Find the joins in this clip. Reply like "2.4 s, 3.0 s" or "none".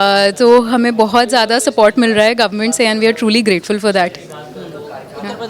none